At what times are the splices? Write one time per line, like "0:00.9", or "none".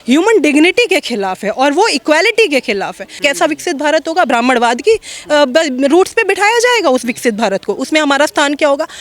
0:03.1